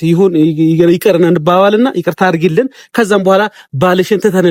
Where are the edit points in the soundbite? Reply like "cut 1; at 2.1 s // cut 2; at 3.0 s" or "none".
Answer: none